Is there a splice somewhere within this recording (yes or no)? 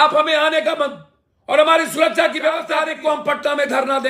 yes